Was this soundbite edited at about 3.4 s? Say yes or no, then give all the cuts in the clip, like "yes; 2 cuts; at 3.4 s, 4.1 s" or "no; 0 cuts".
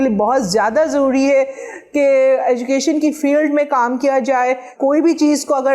no; 1 cut; at 4.7 s